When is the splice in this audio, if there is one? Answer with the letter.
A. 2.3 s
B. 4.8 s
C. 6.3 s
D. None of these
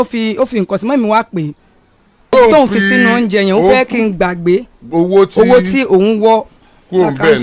A